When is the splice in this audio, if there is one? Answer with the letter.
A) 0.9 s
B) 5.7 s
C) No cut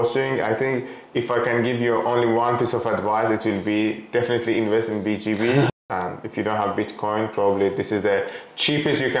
B